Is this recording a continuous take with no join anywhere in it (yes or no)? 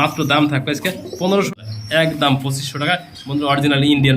no